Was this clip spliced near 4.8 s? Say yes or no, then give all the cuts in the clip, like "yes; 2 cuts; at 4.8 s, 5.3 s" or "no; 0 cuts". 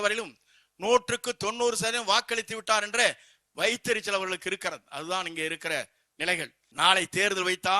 no; 1 cut; at 6.6 s